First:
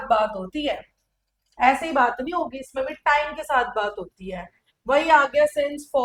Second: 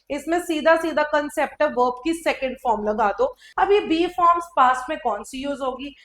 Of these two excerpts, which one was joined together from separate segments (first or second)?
second